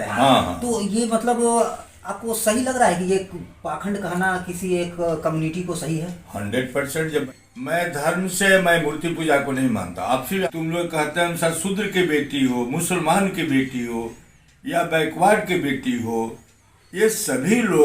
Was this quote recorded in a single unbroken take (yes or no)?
no